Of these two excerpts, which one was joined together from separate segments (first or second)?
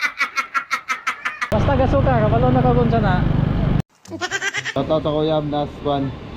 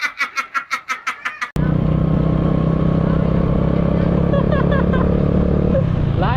first